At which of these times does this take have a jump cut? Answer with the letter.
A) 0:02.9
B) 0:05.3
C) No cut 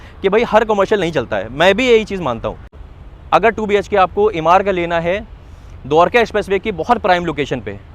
A